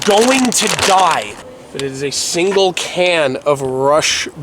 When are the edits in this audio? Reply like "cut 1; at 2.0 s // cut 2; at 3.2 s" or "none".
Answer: cut 1; at 1.4 s